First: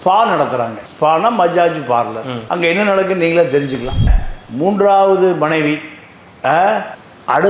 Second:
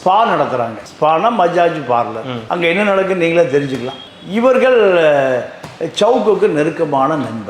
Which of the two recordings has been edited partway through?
first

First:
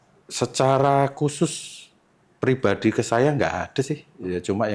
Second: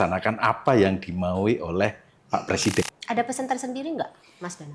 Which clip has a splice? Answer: second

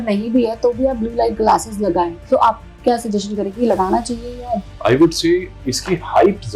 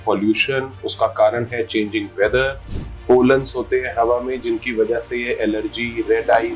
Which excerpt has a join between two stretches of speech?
first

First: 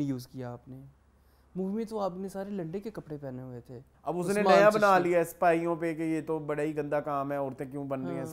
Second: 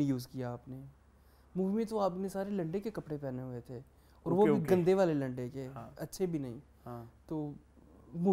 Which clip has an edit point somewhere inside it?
first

